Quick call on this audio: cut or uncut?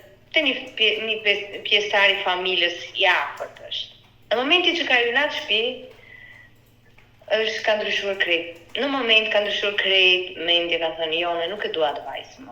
uncut